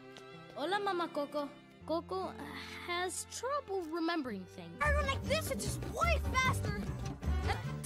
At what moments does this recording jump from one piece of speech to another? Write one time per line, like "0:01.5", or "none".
0:01.7